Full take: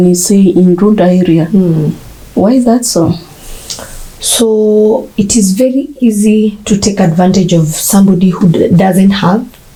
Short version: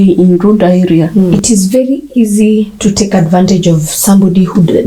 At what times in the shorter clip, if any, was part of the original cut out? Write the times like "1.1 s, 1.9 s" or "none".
1.3 s